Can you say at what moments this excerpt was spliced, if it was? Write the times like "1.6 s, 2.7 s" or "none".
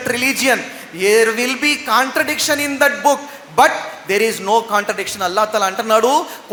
none